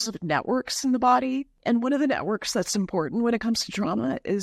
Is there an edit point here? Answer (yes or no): yes